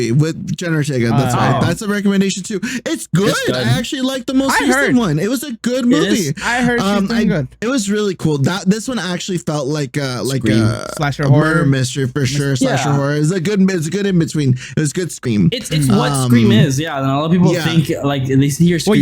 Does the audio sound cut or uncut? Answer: cut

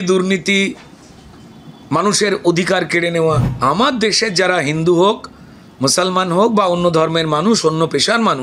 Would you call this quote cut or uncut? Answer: cut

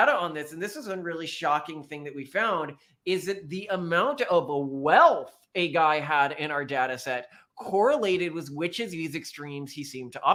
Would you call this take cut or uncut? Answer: uncut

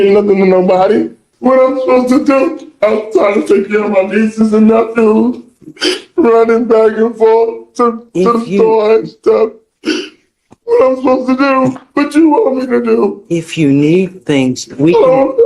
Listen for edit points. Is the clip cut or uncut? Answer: cut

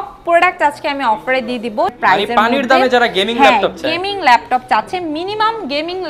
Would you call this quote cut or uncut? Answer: cut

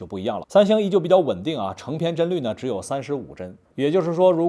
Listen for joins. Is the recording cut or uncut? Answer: cut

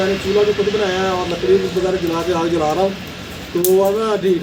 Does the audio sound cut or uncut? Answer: uncut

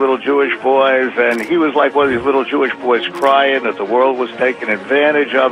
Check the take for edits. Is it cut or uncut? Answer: uncut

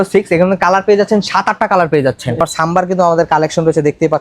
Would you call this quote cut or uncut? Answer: cut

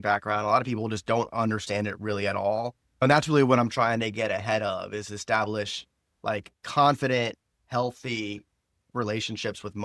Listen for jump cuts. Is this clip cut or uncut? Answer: cut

